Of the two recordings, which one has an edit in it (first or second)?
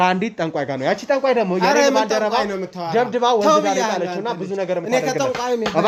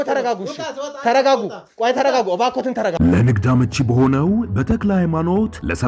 second